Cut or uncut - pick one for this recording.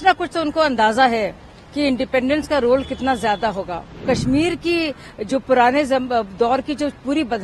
cut